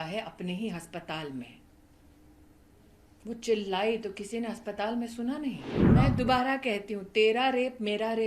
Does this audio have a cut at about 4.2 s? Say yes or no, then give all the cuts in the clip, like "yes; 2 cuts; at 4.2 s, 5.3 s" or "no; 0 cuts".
no; 1 cut; at 5.7 s